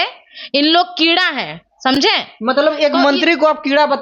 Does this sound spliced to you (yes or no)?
no